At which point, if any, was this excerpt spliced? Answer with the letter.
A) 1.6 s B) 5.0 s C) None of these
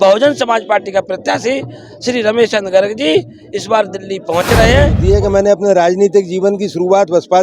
B